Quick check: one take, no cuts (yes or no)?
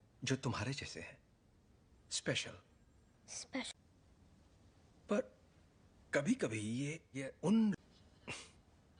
yes